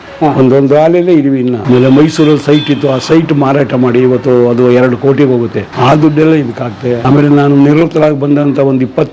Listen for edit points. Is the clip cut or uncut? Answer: cut